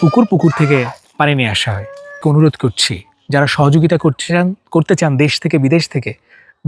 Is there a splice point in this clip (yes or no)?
yes